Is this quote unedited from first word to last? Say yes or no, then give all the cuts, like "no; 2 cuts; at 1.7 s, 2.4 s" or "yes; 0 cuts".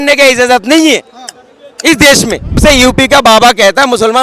no; 1 cut; at 2.6 s